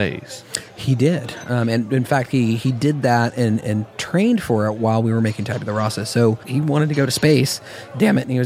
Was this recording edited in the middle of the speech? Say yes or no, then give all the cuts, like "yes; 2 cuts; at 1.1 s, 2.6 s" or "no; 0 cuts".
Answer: yes; 1 cut; at 6.4 s